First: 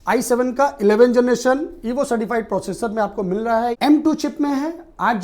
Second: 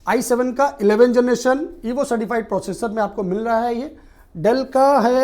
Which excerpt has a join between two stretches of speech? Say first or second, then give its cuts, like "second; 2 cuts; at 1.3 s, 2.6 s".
first; 1 cut; at 3.8 s